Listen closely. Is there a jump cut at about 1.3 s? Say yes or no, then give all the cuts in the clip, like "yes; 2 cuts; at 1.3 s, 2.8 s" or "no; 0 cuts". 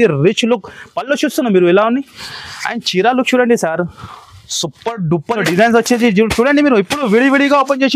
no; 1 cut; at 5.4 s